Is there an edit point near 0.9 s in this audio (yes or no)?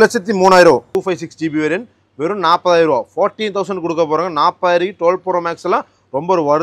yes